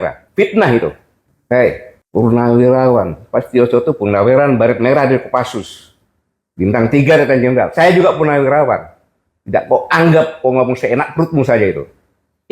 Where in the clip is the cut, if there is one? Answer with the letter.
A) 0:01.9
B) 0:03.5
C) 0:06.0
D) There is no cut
A